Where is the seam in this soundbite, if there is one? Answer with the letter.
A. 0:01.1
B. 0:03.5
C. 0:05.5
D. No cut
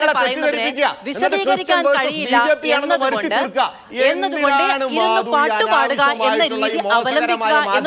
D